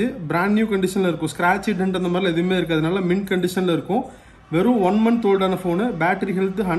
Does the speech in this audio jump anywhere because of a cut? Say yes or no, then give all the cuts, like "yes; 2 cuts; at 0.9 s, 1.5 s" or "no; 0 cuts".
no; 0 cuts